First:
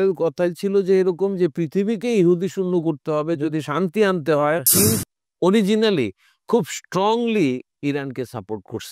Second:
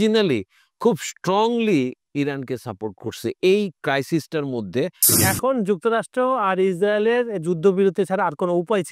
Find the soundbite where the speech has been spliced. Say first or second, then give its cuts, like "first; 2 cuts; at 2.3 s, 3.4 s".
first; 1 cut; at 4.7 s